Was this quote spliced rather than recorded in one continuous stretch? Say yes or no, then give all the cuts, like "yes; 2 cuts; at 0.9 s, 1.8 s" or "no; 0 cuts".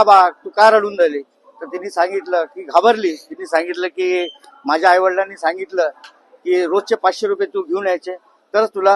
no; 0 cuts